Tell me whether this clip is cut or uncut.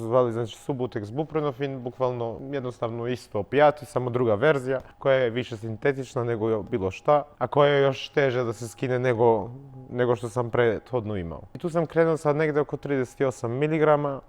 uncut